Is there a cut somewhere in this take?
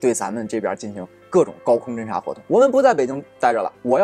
yes; 1 cut; at 2.3 s

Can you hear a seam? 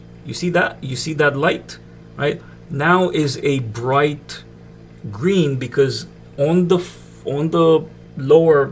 no; 0 cuts

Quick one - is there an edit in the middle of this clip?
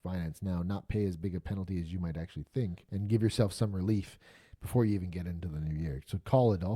yes; 1 cut; at 2.8 s

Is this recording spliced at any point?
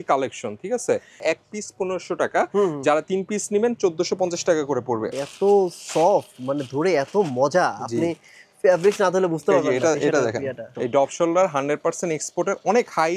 yes; 3 cuts; at 1.2 s, 5.1 s, 10.7 s

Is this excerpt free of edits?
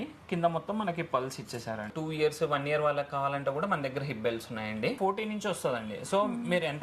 no; 2 cuts; at 1.9 s, 5.0 s

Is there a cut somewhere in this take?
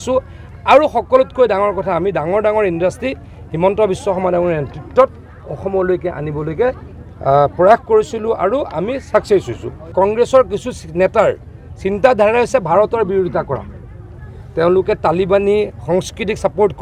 yes; 1 cut; at 9.8 s

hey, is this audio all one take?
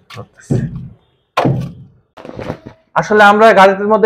no; 1 cut; at 2.3 s

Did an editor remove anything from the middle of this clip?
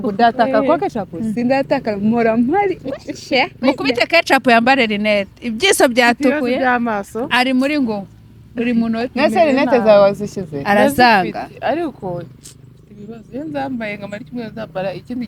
no; 0 cuts

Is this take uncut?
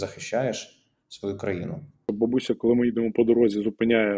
no; 1 cut; at 2.1 s

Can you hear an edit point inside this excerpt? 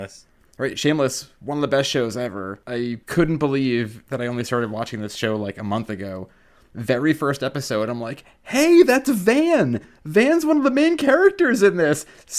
yes; 3 cuts; at 1.3 s, 2.9 s, 4.0 s

